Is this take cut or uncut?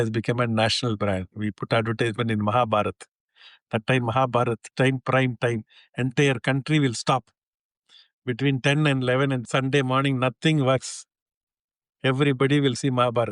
cut